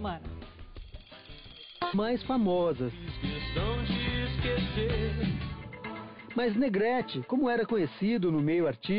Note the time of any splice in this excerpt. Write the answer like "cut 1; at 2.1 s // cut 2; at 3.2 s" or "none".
none